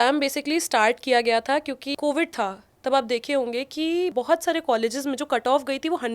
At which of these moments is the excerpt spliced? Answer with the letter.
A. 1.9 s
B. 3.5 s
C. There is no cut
A